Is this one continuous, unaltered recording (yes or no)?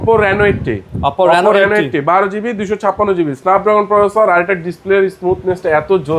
yes